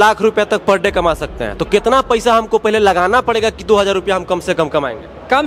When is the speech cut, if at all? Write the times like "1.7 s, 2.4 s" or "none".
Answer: none